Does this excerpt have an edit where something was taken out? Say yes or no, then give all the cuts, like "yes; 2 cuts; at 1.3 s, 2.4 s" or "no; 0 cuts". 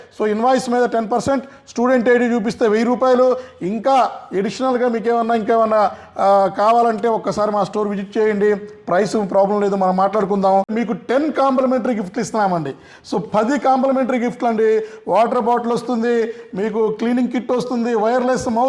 yes; 1 cut; at 10.7 s